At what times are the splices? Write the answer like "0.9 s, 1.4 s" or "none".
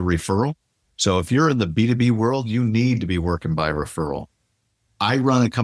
none